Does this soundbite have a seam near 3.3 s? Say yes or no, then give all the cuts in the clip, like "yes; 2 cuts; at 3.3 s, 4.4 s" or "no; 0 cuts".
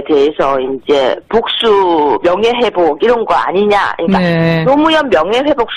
no; 1 cut; at 1.6 s